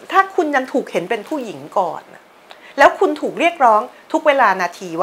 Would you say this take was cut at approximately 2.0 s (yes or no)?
no